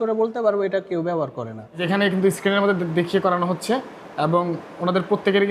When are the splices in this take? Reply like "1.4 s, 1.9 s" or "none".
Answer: 1.8 s

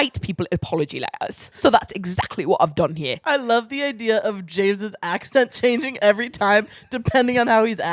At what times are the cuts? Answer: 1.4 s, 3.2 s

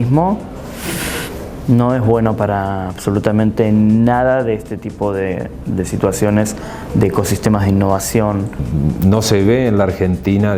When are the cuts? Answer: 8.7 s

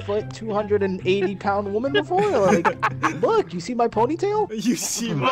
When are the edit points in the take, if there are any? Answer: none

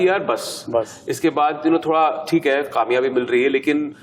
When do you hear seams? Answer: none

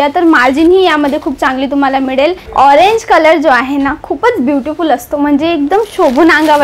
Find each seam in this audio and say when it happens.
2.4 s

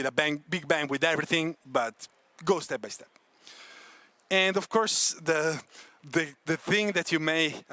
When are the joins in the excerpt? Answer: none

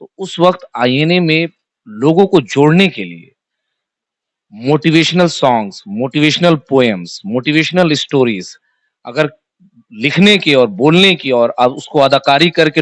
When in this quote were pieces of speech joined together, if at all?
none

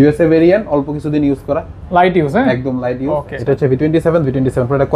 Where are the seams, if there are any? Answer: 3.3 s

